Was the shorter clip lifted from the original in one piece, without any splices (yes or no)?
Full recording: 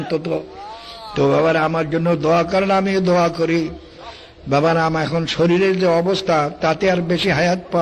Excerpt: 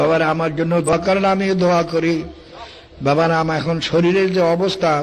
no